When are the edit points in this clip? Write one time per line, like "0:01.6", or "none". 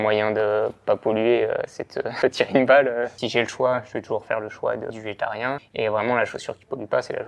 0:02.0
0:03.2
0:05.4